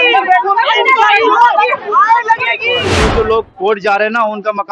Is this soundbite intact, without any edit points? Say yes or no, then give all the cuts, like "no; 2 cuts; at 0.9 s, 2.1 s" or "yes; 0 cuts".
no; 1 cut; at 2.9 s